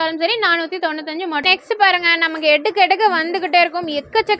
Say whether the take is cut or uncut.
cut